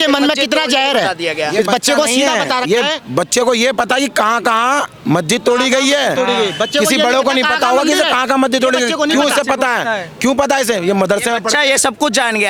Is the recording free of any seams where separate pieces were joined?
yes; 0 cuts

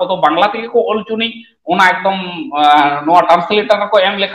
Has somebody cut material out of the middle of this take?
no; 0 cuts

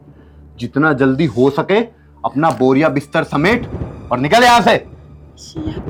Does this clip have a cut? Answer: no; 0 cuts

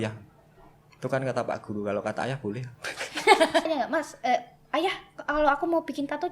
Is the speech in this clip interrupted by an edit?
yes; 1 cut; at 3.7 s

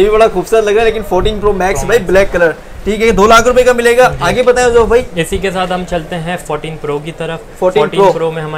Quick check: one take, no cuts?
yes; 0 cuts

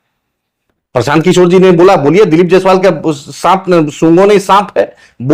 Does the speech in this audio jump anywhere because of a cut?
no; 0 cuts

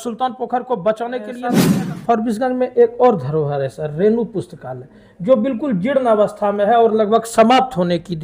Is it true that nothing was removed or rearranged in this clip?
no; 1 cut; at 1.7 s

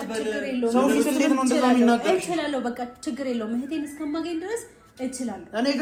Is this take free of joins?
yes; 0 cuts

